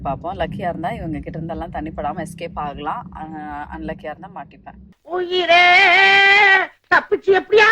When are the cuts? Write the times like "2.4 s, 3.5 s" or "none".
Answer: none